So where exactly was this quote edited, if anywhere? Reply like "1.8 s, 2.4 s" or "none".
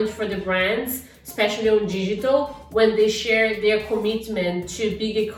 none

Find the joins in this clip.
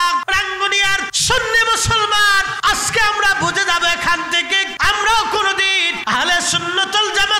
0.8 s, 2.5 s, 4.7 s, 5.9 s

